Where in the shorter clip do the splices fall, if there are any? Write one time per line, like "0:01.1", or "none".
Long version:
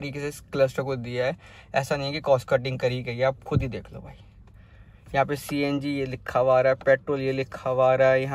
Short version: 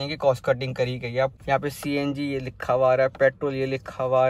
0:01.4

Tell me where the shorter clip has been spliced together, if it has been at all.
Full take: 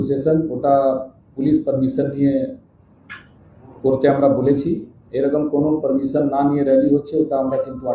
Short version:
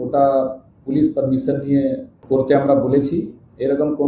0:02.1

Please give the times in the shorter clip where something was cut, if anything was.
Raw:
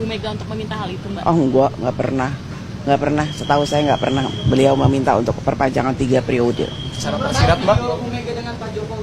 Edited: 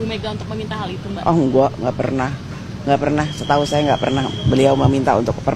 none

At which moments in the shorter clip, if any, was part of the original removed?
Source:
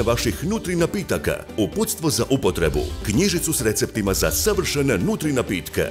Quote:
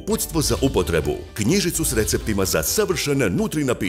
none

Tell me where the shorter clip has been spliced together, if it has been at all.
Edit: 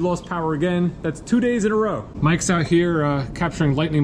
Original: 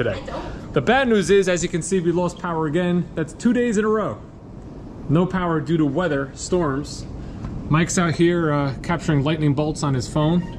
0:02.1

